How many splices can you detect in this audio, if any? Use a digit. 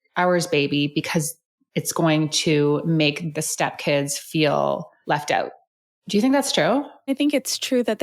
2